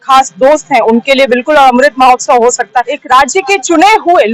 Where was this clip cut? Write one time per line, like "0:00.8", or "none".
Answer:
0:02.9